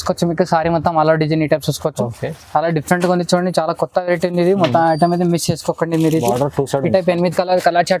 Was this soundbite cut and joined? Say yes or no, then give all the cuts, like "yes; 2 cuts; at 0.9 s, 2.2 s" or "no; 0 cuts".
no; 0 cuts